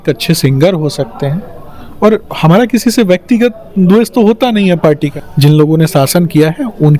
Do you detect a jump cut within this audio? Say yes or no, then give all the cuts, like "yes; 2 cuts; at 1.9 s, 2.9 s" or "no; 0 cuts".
yes; 1 cut; at 5.2 s